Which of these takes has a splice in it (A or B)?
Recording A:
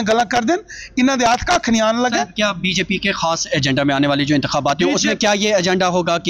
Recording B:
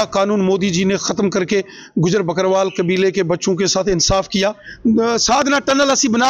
B